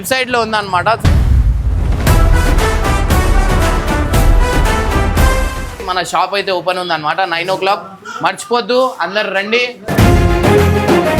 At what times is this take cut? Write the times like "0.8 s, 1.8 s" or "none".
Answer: 5.8 s